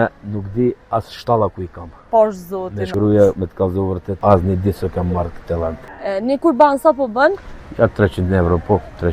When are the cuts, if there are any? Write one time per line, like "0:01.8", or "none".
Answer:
0:02.8
0:04.1
0:05.9